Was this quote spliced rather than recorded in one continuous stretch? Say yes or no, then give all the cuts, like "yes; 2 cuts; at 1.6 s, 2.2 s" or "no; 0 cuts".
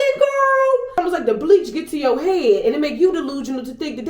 yes; 1 cut; at 1.0 s